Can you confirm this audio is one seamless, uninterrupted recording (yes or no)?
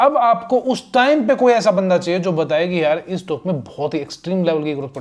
yes